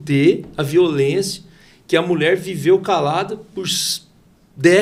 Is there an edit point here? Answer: no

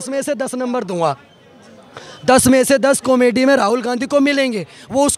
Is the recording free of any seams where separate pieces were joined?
yes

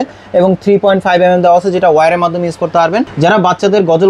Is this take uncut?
no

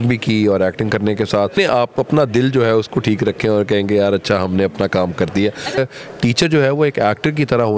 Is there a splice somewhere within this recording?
yes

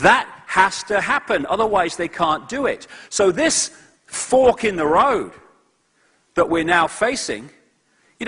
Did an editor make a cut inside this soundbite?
no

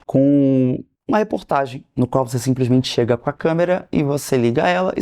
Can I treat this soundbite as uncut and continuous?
no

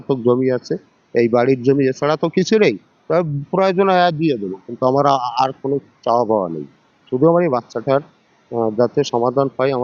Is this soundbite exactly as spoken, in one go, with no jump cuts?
yes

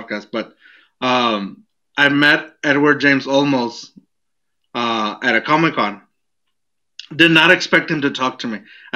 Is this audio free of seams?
yes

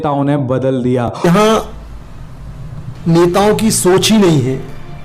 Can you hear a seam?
yes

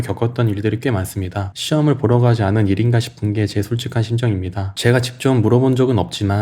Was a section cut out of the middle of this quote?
no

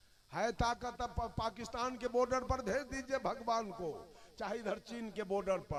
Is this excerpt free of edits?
yes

